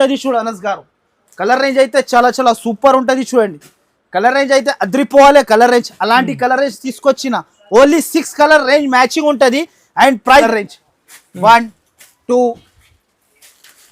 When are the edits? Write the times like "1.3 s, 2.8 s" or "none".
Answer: 10.4 s